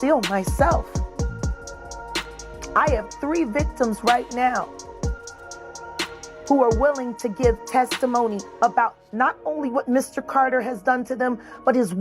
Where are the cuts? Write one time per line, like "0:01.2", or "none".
0:04.8
0:06.4